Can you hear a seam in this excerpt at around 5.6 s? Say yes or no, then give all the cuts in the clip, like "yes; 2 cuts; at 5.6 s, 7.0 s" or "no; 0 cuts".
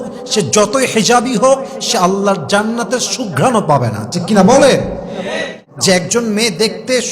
yes; 1 cut; at 5.6 s